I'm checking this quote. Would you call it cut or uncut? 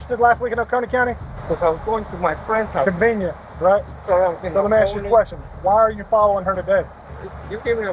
cut